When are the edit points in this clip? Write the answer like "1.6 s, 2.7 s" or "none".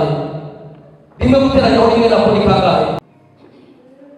3.0 s